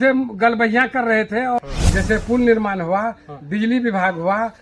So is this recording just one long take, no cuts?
no; 1 cut; at 1.6 s

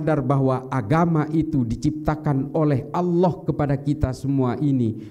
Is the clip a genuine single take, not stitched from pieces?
yes; 0 cuts

